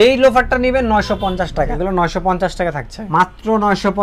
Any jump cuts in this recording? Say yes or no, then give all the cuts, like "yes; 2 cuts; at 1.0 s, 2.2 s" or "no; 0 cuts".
yes; 2 cuts; at 1.8 s, 2.9 s